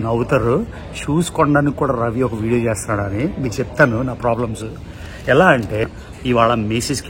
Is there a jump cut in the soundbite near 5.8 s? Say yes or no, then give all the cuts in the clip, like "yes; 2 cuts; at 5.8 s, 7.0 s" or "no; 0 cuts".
yes; 1 cut; at 5.8 s